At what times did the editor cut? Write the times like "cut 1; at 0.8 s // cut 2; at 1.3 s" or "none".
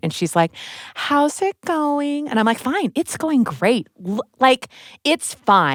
none